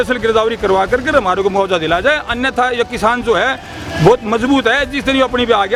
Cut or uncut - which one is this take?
uncut